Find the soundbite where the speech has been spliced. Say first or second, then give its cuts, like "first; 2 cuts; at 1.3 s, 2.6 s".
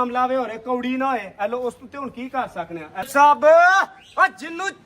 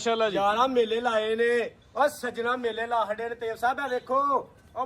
first; 1 cut; at 3.1 s